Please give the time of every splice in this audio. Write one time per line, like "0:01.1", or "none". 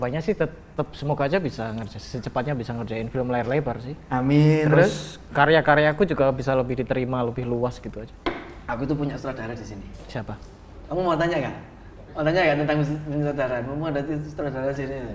none